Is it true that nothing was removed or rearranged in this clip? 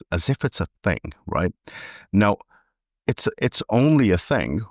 yes; 0 cuts

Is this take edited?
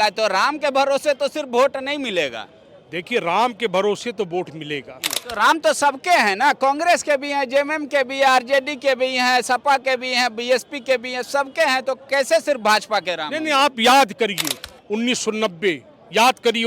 yes; 1 cut; at 5.2 s

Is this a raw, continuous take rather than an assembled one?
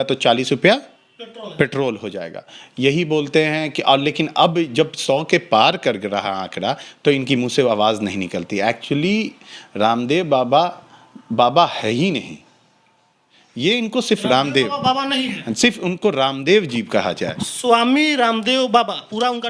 yes; 0 cuts

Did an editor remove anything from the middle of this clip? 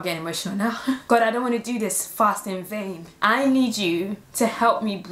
yes; 3 cuts; at 1.0 s, 3.1 s, 4.2 s

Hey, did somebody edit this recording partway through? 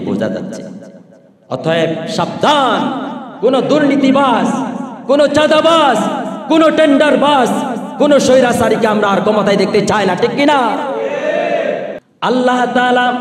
yes; 1 cut; at 12.0 s

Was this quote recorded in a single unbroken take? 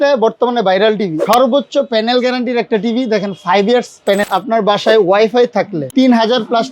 no; 3 cuts; at 1.2 s, 4.2 s, 5.8 s

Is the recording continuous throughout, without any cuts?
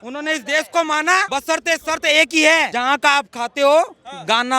no; 2 cuts; at 1.3 s, 2.7 s

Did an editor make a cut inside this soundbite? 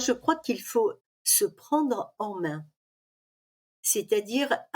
yes; 1 cut; at 1.0 s

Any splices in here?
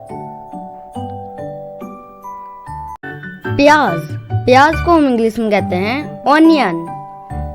yes; 1 cut; at 3.0 s

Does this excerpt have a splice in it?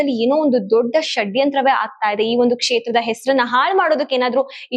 no; 0 cuts

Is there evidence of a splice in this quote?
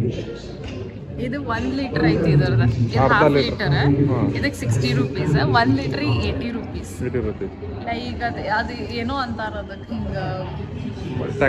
no; 0 cuts

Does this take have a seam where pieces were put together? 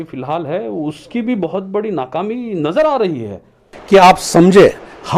yes; 1 cut; at 3.7 s

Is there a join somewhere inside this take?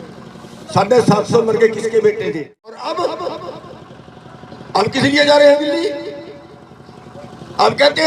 yes; 1 cut; at 2.8 s

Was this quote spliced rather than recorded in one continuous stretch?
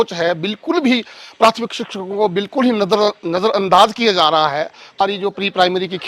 yes; 1 cut; at 5.0 s

